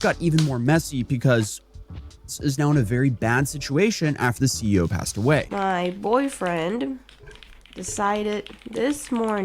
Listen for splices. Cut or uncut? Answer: cut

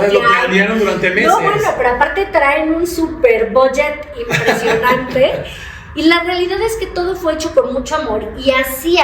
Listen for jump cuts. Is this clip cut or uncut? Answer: uncut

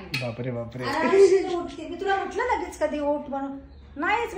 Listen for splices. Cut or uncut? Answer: uncut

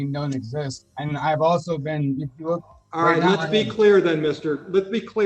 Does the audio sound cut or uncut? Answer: uncut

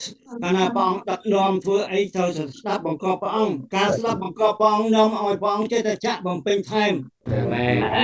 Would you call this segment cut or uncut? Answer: cut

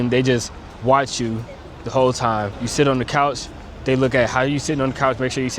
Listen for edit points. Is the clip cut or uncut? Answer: cut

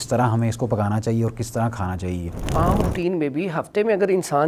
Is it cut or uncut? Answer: cut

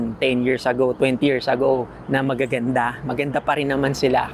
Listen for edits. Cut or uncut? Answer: uncut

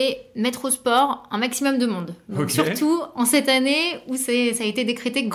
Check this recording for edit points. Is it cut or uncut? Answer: uncut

